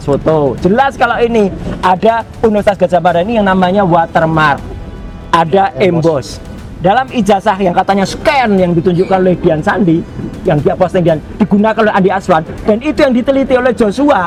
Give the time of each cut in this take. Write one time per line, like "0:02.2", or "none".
none